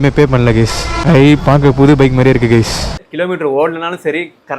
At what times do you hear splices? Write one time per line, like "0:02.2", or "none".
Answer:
0:02.9